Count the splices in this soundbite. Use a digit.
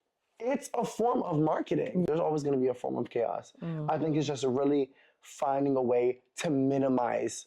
1